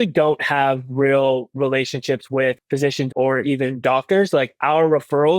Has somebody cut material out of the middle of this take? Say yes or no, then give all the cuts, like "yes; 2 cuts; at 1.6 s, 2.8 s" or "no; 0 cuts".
yes; 1 cut; at 3.0 s